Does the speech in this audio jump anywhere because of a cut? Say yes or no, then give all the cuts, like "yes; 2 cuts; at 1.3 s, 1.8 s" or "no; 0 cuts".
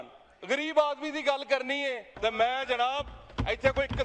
yes; 1 cut; at 2.1 s